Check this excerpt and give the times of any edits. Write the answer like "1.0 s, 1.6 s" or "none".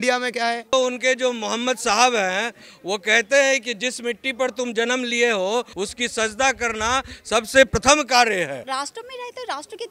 0.7 s, 5.7 s, 8.6 s